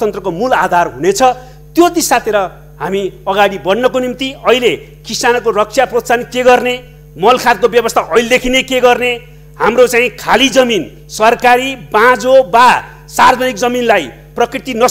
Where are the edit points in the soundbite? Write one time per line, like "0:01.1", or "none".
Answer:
none